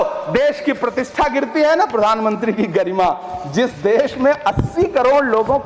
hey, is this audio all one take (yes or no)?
yes